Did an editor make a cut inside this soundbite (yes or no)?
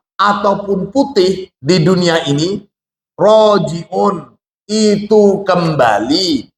yes